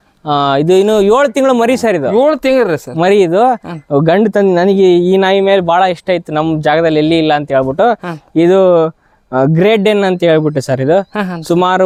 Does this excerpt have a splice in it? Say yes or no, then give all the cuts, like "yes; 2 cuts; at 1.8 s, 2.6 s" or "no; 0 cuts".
no; 0 cuts